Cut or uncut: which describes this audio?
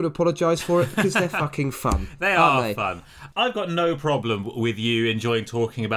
uncut